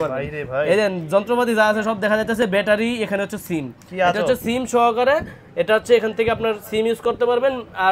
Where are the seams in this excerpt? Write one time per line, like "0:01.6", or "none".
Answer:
none